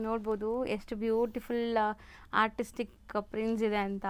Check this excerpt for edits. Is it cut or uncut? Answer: uncut